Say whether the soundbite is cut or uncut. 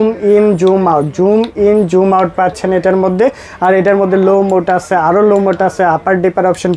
uncut